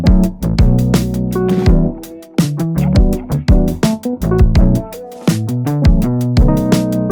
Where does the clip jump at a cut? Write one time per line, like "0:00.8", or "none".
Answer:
none